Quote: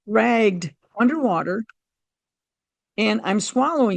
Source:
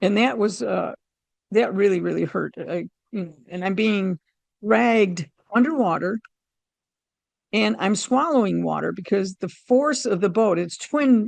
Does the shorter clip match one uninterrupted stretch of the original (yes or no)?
yes